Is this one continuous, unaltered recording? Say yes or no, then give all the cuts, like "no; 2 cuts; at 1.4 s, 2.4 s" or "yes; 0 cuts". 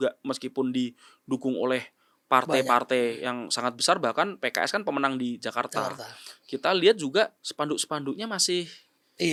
yes; 0 cuts